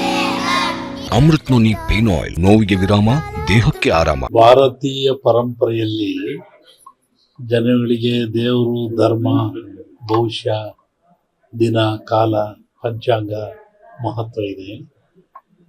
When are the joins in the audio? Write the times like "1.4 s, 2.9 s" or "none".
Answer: 1.0 s, 2.3 s, 4.2 s